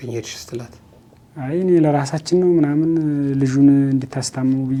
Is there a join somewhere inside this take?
no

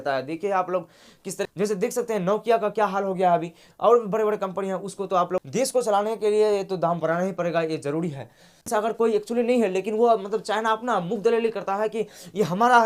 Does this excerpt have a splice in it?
yes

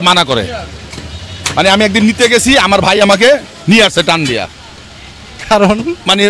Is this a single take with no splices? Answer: yes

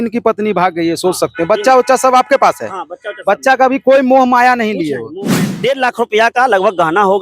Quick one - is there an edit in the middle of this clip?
yes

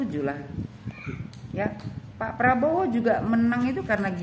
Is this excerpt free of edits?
yes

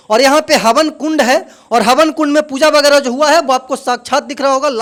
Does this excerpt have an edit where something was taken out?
no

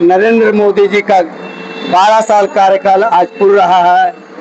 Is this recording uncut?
yes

